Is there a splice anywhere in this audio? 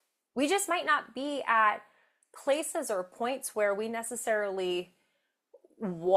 no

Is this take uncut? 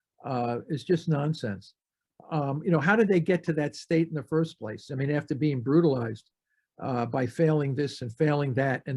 yes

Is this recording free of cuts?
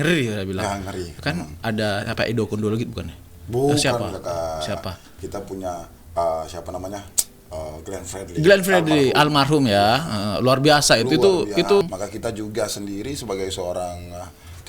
no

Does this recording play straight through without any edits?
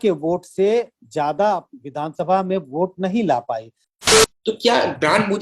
no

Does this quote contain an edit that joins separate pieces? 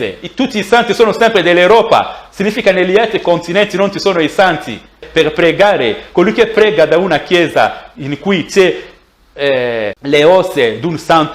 yes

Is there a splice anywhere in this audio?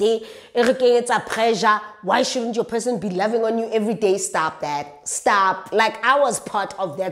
no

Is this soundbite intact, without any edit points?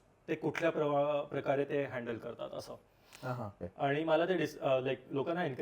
no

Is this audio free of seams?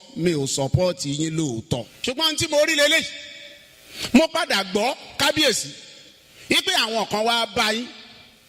no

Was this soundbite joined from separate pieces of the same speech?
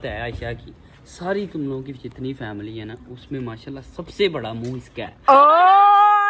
no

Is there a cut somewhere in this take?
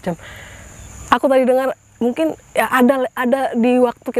no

